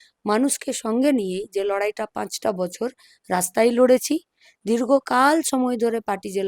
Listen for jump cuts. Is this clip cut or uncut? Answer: uncut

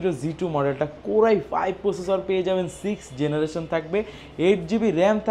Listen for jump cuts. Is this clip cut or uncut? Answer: uncut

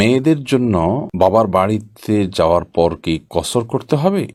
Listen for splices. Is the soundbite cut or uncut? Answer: uncut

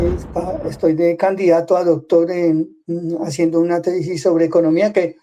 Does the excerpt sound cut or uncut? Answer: uncut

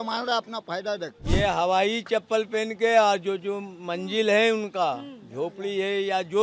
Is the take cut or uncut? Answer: cut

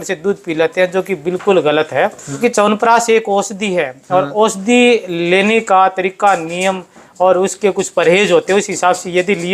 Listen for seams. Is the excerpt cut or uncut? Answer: cut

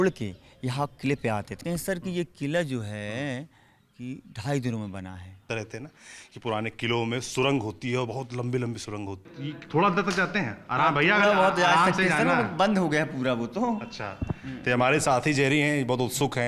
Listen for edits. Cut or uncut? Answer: cut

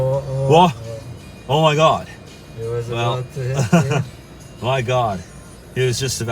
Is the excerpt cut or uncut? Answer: uncut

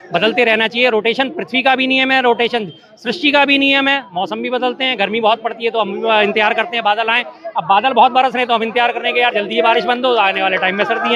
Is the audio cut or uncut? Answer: uncut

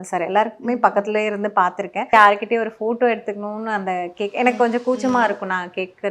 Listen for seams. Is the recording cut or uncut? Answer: cut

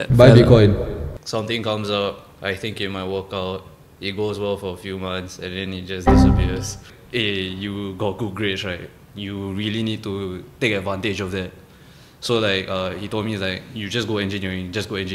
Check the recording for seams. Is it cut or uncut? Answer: cut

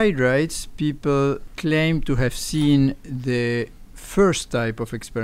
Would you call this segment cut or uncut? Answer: cut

